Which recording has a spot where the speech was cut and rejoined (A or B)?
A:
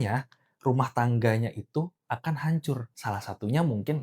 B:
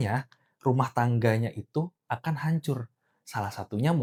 A